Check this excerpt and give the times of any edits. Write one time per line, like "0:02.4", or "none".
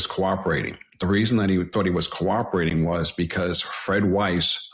none